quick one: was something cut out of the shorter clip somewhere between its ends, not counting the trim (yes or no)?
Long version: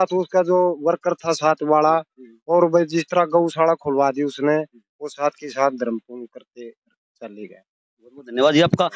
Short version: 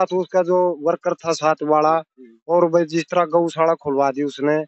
no